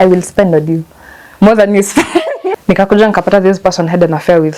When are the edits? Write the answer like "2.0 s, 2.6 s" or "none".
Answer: 2.5 s